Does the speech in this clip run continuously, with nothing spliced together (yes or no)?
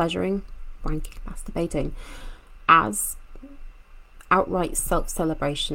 yes